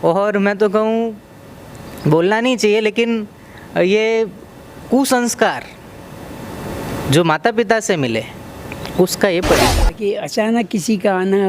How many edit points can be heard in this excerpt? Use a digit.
1